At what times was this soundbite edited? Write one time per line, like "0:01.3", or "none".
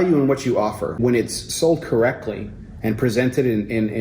0:00.9